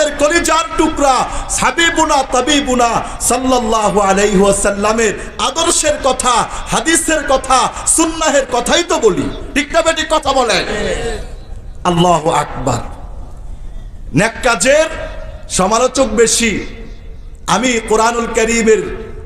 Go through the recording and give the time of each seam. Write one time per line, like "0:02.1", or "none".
none